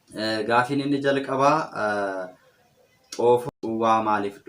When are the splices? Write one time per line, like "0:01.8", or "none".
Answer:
0:03.5